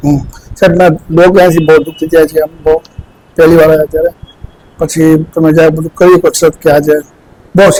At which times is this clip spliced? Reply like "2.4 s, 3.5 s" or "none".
none